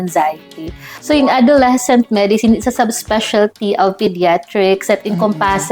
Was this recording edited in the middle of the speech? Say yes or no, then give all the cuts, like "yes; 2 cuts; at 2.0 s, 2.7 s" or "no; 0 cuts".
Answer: yes; 1 cut; at 0.9 s